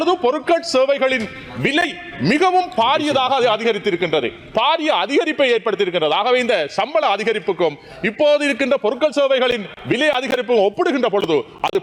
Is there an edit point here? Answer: no; 0 cuts

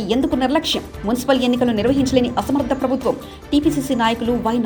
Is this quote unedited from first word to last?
yes; 0 cuts

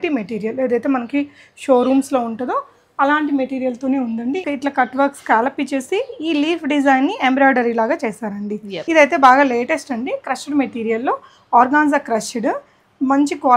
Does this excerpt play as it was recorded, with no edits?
no; 2 cuts; at 4.4 s, 8.8 s

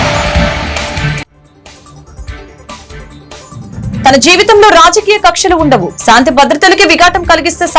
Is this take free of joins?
yes; 0 cuts

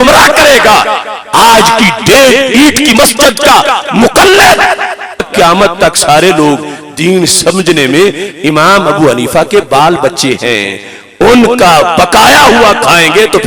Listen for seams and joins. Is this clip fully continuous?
no; 1 cut; at 5.2 s

